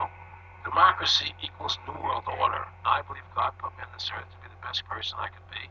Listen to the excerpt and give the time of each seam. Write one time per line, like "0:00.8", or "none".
0:02.7
0:04.8